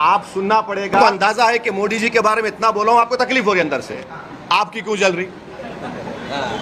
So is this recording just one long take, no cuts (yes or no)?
no